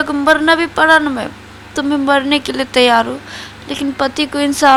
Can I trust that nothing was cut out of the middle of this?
yes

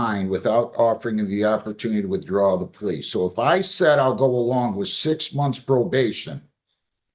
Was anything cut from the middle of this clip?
no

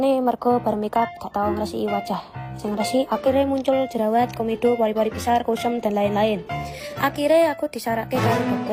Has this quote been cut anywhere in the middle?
no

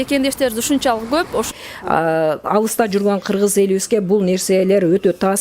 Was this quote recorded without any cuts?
no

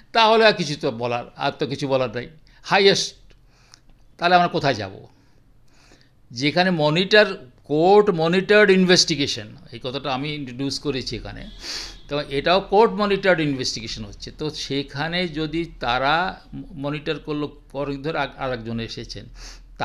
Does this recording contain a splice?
no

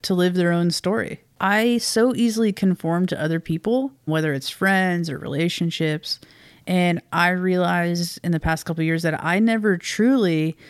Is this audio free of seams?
no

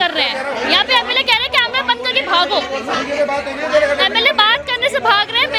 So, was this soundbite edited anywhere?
no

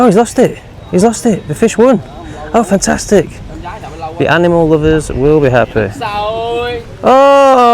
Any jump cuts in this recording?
no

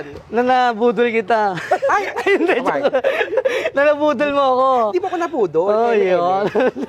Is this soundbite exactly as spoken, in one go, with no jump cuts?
yes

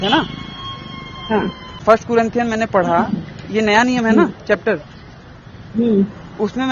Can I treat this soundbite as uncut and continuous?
yes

